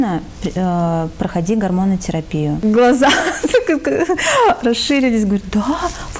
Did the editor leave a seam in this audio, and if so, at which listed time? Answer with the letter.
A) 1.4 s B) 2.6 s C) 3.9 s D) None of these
B